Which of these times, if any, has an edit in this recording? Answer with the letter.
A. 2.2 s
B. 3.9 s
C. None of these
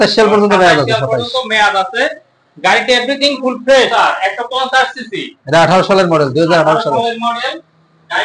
B